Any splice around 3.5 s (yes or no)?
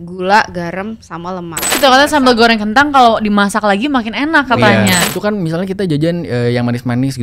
no